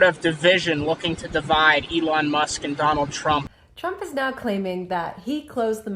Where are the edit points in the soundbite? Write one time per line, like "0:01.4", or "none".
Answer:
0:03.5

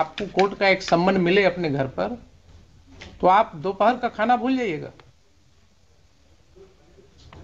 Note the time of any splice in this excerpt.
none

